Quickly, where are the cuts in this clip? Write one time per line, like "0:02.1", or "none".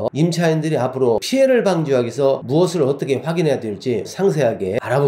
0:01.2